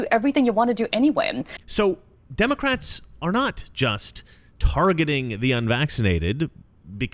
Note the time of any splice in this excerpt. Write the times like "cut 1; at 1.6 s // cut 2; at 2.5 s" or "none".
cut 1; at 1.4 s